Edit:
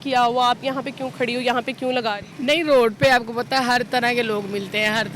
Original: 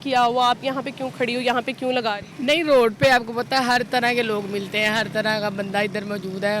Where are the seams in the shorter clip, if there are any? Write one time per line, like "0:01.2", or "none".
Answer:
none